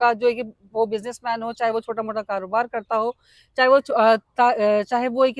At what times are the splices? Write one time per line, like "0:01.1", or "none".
none